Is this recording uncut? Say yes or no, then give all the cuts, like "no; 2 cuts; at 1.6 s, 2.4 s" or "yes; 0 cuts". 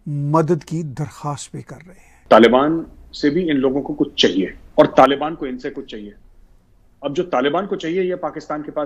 no; 2 cuts; at 2.1 s, 4.6 s